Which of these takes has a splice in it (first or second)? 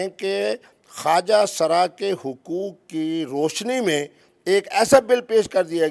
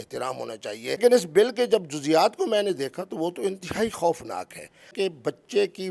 second